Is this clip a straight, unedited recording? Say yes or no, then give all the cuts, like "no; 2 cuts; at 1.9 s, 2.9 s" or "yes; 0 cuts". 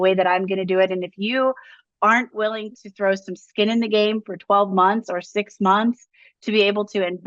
yes; 0 cuts